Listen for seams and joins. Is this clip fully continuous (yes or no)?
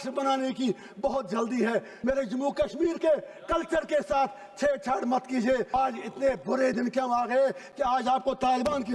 no